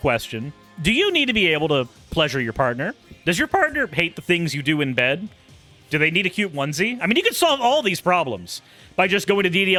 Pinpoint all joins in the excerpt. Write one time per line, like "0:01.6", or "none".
none